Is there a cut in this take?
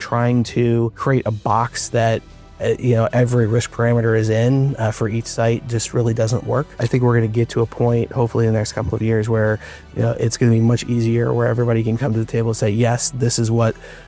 yes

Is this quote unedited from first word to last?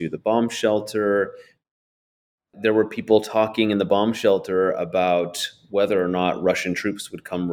no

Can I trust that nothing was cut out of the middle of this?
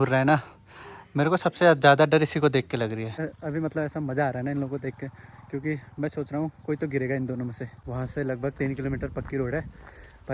no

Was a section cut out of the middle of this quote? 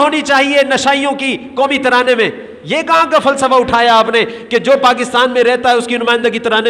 no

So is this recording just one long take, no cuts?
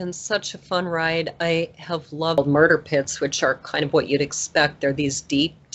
no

